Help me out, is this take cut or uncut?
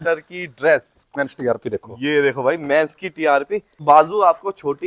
cut